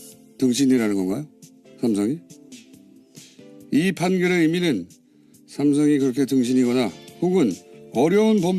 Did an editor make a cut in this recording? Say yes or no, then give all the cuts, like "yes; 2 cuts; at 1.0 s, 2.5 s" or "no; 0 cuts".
yes; 1 cut; at 3.4 s